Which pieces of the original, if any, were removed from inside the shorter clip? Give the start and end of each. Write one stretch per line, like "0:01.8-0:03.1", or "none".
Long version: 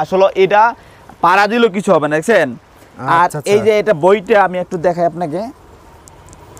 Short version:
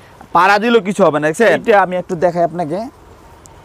0:02.5-0:04.2